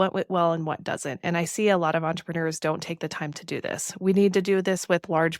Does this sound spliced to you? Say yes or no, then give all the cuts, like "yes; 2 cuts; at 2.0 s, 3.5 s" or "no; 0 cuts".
no; 0 cuts